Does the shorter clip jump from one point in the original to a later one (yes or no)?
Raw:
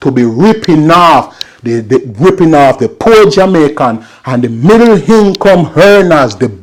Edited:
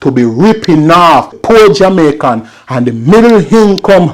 yes